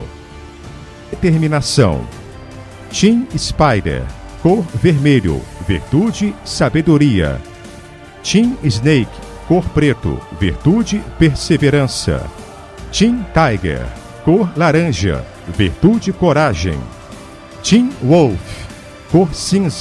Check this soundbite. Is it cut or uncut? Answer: uncut